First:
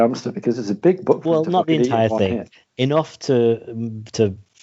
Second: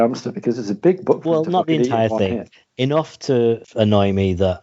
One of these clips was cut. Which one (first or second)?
second